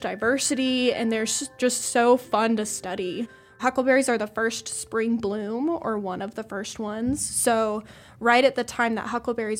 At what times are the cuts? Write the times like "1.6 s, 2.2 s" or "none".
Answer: 1.6 s, 3.4 s